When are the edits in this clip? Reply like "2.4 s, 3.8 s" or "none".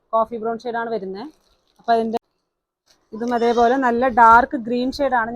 2.2 s